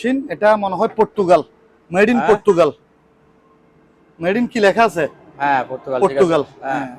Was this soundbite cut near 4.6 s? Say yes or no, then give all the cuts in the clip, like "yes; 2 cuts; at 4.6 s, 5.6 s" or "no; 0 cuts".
no; 0 cuts